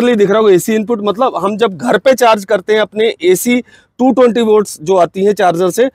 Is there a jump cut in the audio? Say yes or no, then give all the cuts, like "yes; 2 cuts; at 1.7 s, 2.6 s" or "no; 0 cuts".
no; 0 cuts